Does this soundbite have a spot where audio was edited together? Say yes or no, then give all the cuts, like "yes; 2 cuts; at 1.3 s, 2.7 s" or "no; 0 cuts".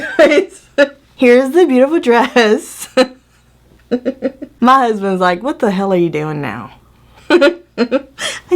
yes; 2 cuts; at 1.0 s, 4.4 s